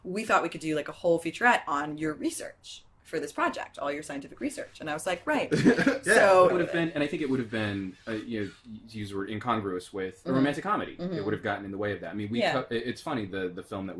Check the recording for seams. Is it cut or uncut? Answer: uncut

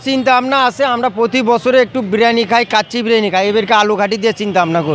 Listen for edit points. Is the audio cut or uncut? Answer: uncut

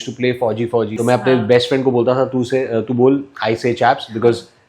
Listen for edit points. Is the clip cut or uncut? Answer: cut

